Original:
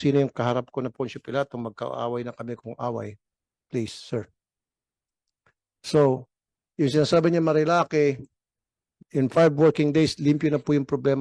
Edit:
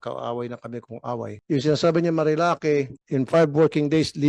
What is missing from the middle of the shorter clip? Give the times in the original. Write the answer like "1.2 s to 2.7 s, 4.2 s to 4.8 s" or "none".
3.1 s to 6.6 s, 8.3 s to 9.0 s